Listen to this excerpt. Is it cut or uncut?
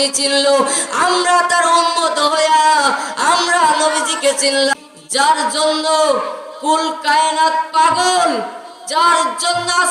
cut